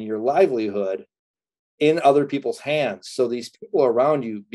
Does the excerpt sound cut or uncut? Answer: uncut